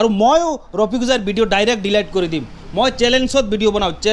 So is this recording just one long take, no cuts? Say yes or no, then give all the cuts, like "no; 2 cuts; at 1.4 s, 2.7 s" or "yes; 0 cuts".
yes; 0 cuts